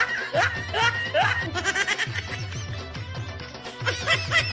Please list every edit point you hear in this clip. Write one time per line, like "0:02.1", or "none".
none